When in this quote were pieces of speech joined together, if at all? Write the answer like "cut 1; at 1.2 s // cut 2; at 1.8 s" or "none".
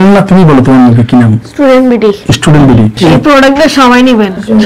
cut 1; at 2.9 s